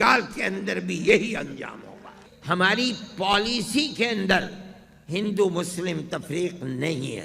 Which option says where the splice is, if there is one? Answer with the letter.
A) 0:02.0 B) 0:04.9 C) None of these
A